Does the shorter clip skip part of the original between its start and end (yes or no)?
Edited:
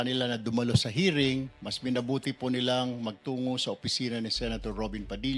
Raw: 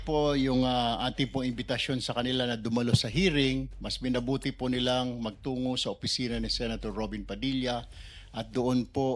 no